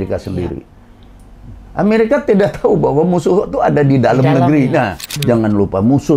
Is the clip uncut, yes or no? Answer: no